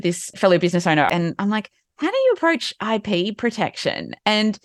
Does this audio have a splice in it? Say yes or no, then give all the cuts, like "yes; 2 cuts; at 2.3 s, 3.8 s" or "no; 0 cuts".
yes; 1 cut; at 1.1 s